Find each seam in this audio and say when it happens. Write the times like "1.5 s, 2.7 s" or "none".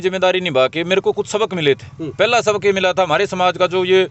none